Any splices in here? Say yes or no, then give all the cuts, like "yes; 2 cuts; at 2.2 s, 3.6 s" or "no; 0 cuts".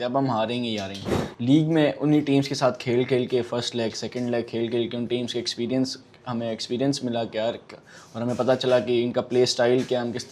no; 0 cuts